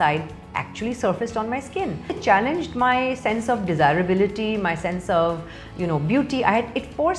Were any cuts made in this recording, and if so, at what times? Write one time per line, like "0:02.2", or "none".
0:02.2